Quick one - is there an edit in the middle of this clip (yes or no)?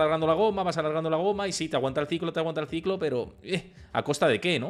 no